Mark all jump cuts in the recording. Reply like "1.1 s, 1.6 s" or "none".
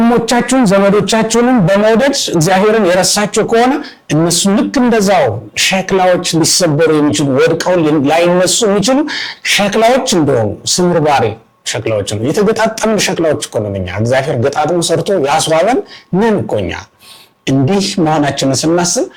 none